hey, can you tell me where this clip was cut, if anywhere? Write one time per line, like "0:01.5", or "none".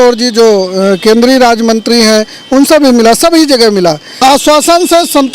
0:04.1